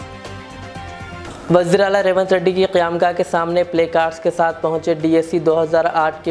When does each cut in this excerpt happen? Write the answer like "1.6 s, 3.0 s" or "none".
1.2 s